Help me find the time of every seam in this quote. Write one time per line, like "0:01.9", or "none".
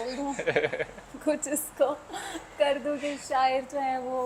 none